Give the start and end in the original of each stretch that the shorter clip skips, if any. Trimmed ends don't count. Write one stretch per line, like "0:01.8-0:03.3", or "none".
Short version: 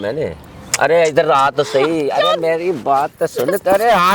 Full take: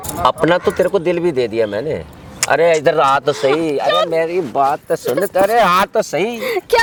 none

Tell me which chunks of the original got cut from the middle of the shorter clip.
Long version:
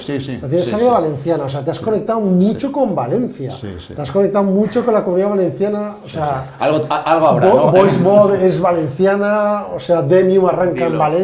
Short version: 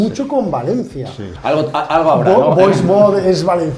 0:03.7-0:06.5

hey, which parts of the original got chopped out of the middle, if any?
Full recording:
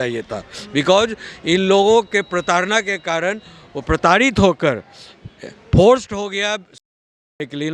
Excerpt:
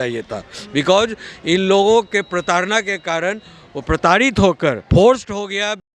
0:04.8-0:05.6

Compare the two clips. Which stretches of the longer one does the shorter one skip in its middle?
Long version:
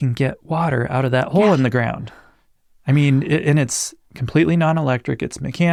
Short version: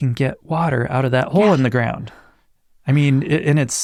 none

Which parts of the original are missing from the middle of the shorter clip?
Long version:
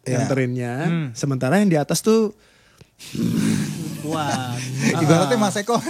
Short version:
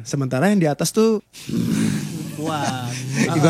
0:02.5-0:03.0

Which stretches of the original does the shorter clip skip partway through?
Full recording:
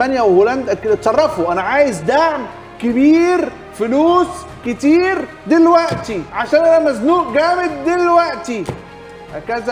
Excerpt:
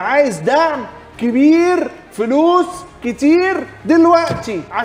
none

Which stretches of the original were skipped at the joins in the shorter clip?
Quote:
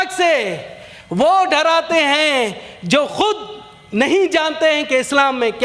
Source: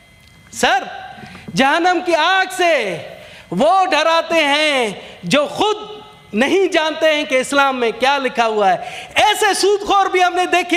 none

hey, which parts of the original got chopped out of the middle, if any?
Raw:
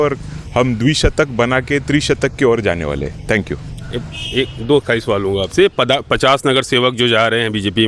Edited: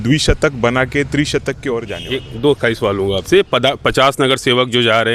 0:02.7-0:04.2

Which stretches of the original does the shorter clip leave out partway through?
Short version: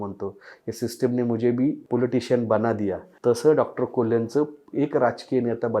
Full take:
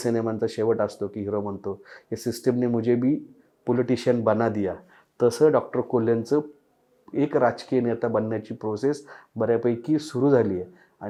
0:03.3-0:03.6
0:04.8-0:05.0
0:06.6-0:07.0

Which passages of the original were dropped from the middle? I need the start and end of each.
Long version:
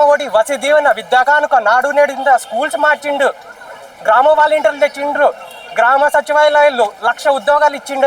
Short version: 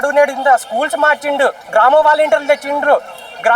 0:03.4-0:03.9

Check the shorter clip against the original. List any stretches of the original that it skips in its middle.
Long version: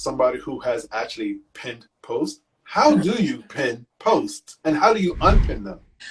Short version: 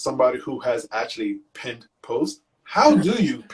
none

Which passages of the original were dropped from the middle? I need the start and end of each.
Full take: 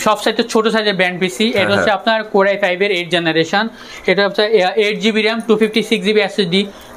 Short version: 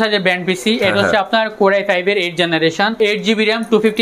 0:03.7-0:04.7

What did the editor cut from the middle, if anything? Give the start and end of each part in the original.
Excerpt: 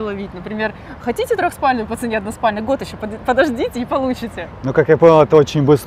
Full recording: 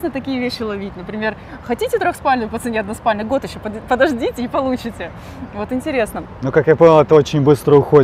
0:05.1-0:06.3

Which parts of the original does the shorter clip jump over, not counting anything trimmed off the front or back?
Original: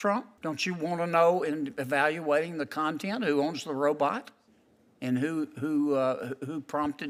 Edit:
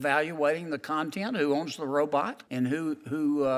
0:04.3-0:04.9

